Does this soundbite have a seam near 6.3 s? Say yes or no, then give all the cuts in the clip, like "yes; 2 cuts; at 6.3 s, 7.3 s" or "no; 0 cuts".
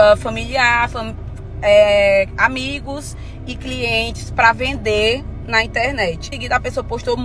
yes; 1 cut; at 6.3 s